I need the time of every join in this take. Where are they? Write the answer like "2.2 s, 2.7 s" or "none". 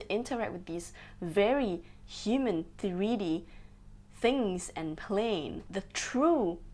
5.6 s